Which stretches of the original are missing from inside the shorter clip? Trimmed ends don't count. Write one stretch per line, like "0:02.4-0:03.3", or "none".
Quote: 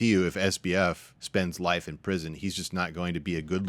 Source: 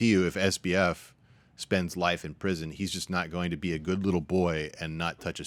0:01.1-0:01.5